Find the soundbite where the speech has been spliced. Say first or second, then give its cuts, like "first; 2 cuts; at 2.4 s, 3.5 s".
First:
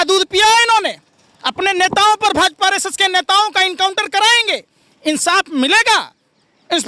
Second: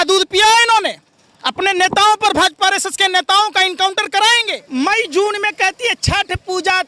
second; 1 cut; at 4.5 s